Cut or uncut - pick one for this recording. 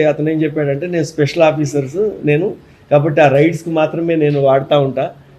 uncut